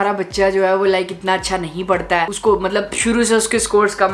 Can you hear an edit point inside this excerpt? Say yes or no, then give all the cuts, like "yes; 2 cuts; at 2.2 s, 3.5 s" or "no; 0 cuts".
no; 0 cuts